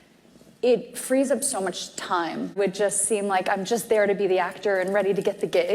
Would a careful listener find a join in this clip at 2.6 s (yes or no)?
yes